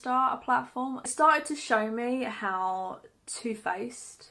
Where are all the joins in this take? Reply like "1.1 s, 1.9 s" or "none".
1.1 s